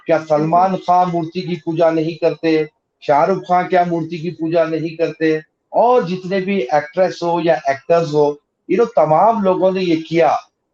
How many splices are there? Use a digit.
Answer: 0